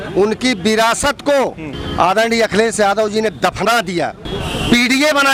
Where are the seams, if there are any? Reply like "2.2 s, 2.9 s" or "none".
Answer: none